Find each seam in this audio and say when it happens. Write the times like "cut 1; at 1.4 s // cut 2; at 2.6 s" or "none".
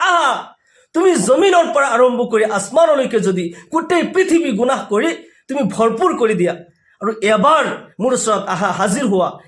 none